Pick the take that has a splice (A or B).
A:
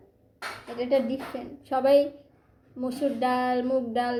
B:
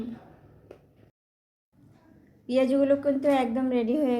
B